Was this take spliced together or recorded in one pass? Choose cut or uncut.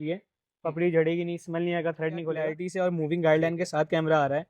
cut